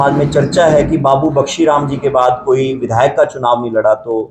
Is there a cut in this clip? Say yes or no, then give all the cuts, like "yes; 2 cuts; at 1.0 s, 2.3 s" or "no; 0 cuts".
no; 0 cuts